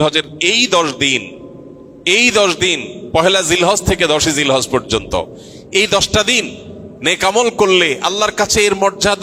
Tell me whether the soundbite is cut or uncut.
uncut